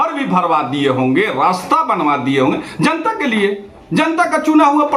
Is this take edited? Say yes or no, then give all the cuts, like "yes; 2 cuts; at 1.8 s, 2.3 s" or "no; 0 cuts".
no; 0 cuts